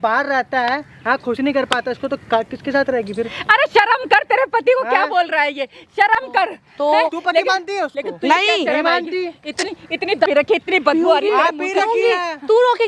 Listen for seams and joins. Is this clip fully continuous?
yes; 0 cuts

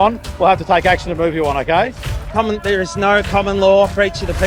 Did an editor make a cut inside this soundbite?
no; 0 cuts

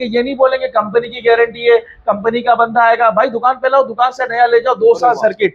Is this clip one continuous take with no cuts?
yes; 0 cuts

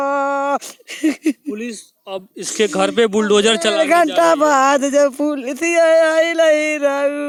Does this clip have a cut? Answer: no; 0 cuts

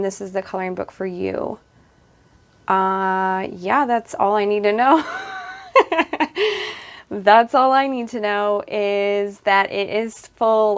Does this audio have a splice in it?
no; 0 cuts

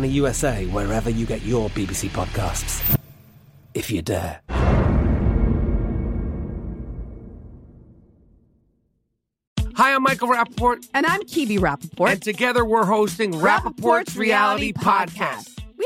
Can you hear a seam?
yes; 1 cut; at 9.4 s

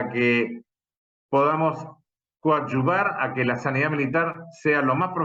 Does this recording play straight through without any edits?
yes; 0 cuts

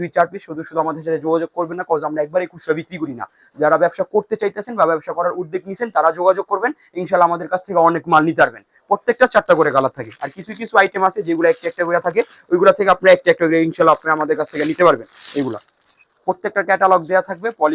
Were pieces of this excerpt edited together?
no; 0 cuts

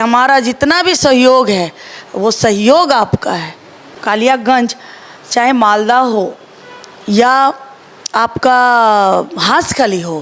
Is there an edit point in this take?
yes; 1 cut; at 4.0 s

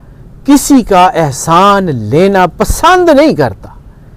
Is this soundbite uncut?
yes; 0 cuts

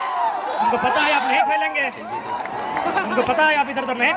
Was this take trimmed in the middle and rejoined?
no; 0 cuts

